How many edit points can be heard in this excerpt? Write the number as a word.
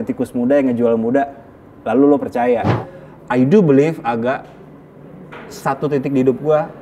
one